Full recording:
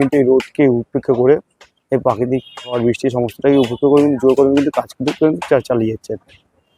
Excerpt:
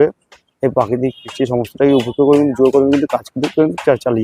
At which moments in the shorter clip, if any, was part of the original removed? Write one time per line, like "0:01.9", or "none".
0:01.3